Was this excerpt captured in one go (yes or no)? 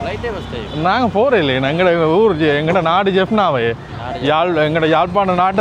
yes